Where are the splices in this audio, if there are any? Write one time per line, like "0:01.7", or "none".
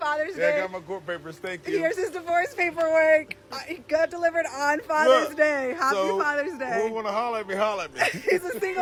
none